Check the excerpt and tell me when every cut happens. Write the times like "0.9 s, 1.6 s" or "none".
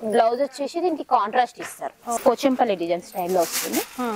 2.2 s